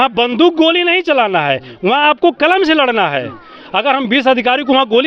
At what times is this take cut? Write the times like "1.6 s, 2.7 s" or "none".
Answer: none

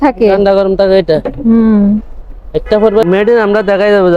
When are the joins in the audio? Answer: 3.1 s

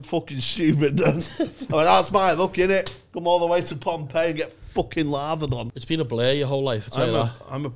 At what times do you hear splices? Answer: 5.7 s

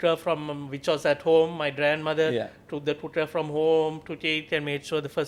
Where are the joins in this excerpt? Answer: none

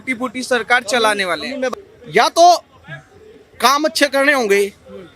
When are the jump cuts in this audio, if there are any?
1.7 s

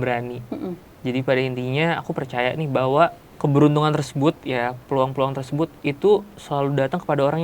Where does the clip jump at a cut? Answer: 3.2 s

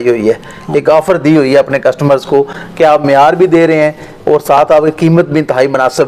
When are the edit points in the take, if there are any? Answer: none

